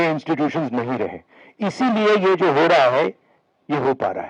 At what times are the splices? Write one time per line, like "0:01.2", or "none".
none